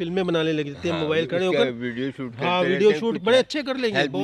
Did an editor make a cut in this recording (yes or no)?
no